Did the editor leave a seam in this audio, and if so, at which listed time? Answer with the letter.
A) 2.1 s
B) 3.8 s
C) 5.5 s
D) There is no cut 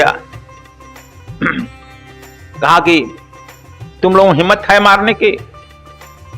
C